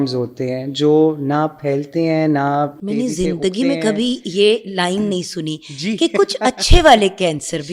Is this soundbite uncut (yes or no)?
yes